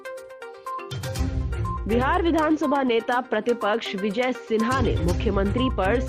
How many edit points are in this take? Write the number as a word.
one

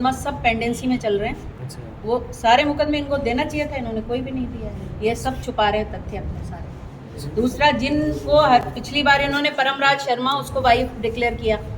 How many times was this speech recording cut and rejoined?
zero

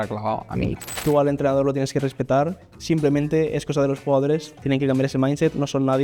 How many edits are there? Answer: two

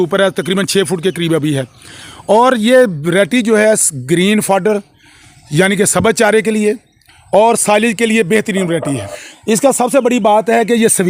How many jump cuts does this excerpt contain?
one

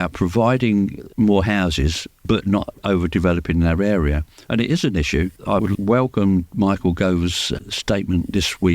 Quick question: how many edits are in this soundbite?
five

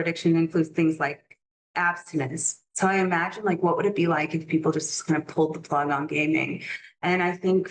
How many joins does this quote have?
zero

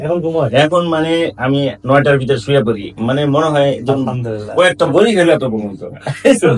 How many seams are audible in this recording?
zero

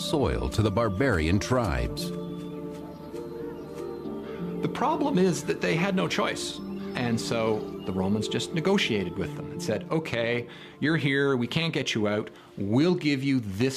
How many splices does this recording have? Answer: one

